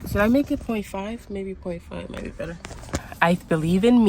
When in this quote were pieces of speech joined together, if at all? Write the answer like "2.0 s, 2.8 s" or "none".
2.9 s